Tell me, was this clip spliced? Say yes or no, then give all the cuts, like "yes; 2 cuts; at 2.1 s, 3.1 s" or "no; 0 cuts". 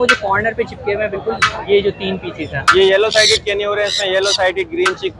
no; 0 cuts